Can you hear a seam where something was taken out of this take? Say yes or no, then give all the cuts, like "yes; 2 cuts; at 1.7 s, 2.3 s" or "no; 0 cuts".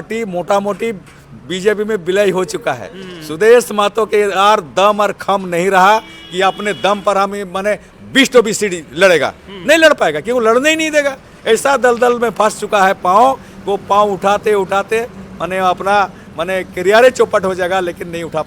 no; 0 cuts